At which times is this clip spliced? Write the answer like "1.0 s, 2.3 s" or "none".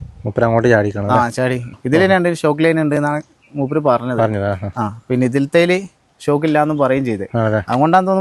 1.7 s